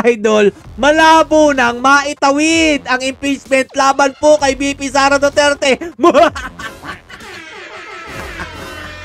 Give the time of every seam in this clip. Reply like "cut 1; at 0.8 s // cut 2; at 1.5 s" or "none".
none